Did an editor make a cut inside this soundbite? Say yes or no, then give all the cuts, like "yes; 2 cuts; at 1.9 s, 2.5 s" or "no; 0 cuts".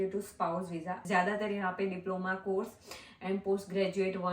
yes; 1 cut; at 1.0 s